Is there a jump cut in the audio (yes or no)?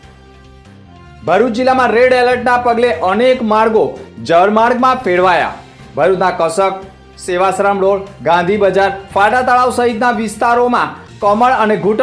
yes